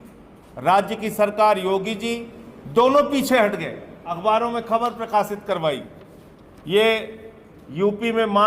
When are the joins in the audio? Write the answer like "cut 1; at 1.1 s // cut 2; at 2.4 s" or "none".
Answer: cut 1; at 4.2 s